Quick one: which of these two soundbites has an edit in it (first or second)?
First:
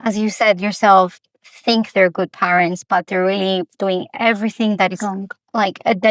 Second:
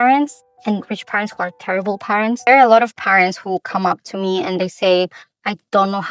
second